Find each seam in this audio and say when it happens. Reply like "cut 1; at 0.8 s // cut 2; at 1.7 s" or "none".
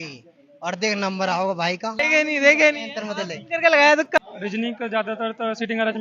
cut 1; at 2.0 s // cut 2; at 4.2 s